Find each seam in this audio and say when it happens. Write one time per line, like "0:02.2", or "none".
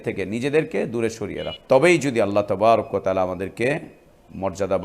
0:01.5